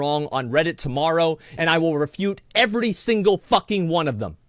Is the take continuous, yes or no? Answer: no